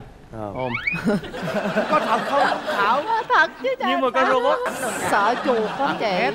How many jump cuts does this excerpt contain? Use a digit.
1